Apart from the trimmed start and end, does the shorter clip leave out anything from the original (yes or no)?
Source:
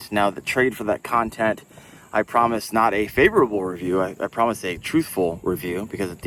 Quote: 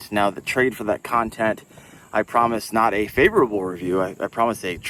no